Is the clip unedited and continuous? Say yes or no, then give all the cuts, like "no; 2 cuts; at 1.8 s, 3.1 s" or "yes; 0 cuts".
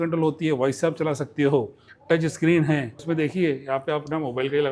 no; 1 cut; at 3.0 s